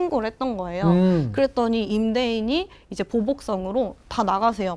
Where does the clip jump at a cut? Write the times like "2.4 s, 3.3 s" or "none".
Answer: none